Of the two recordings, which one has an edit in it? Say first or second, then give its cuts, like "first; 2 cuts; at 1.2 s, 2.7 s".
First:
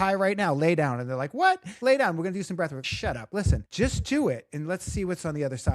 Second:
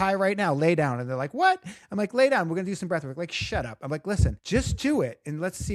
first; 2 cuts; at 1.8 s, 3.1 s